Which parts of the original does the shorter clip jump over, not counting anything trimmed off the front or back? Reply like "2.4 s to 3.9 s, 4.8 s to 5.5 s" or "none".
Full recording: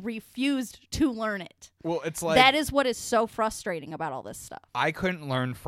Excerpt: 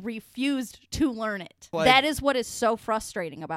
1.6 s to 2.1 s